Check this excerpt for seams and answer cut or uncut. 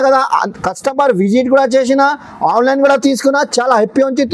uncut